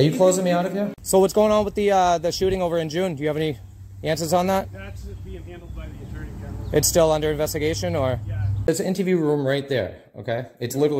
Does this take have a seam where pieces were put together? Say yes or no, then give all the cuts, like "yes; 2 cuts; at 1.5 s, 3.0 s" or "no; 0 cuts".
yes; 2 cuts; at 1.0 s, 8.7 s